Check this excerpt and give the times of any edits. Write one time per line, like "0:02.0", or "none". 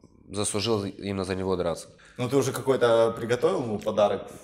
0:02.0

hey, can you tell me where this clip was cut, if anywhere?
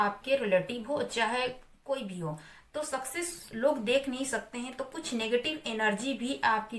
none

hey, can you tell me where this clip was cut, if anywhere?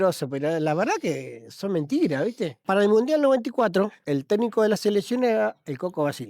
0:02.6
0:04.0

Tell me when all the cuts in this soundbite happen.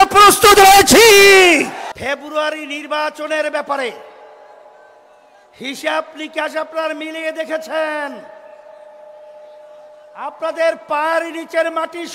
0:01.9

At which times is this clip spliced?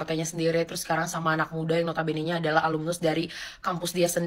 none

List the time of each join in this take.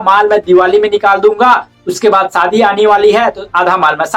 none

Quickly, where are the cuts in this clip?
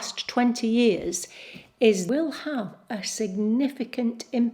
0:02.1

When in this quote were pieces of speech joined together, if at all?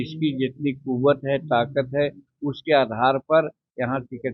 none

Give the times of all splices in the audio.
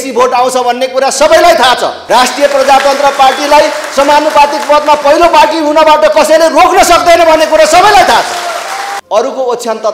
0:01.9
0:08.9

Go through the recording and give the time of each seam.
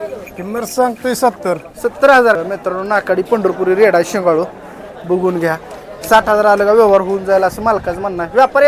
0:02.4

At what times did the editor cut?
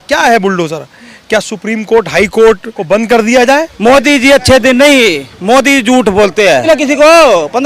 0:02.7
0:03.7
0:06.6

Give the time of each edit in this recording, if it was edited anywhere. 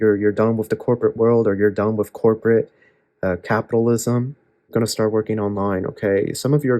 0:04.7

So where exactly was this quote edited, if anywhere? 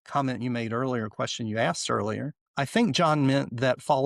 0:02.4

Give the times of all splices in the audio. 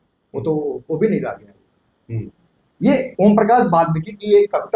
none

